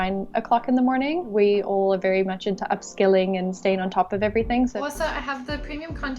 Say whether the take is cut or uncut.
cut